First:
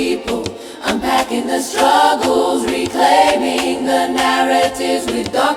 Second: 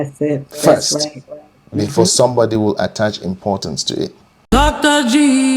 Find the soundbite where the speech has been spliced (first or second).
second